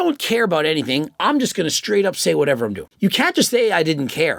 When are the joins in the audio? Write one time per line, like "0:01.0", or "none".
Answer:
0:02.9